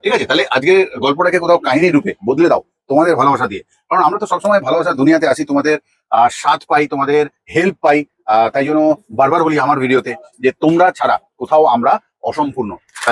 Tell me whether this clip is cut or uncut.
uncut